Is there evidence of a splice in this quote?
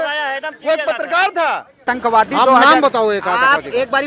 yes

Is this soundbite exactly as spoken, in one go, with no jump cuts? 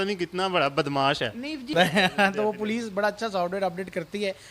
no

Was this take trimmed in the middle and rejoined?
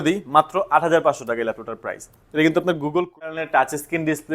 yes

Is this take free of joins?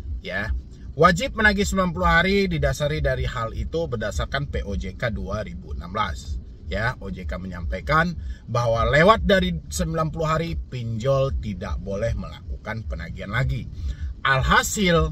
yes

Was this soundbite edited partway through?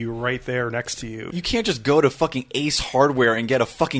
yes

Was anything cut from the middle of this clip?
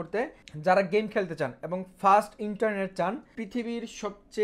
yes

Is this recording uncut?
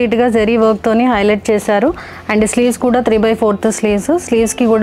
yes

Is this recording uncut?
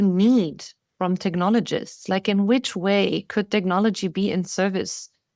yes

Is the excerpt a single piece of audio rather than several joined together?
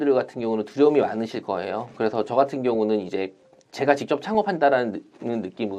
yes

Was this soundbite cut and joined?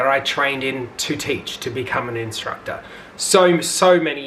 no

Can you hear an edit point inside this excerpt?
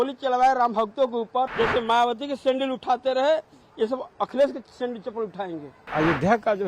yes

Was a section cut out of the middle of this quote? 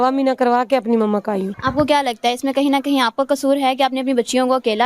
yes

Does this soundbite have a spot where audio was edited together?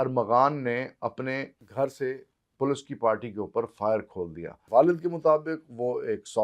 yes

